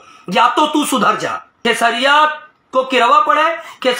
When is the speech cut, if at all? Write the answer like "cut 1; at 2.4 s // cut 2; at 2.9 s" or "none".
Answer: cut 1; at 1.5 s